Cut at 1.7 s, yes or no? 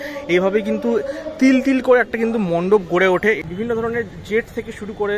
no